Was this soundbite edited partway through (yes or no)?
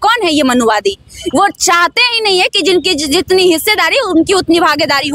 no